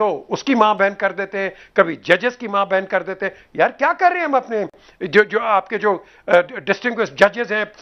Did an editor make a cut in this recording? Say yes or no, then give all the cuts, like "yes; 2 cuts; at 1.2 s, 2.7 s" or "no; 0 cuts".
no; 0 cuts